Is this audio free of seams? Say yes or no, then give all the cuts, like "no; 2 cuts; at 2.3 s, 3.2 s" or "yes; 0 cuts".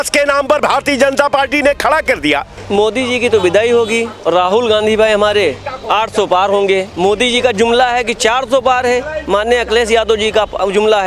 no; 1 cut; at 2.6 s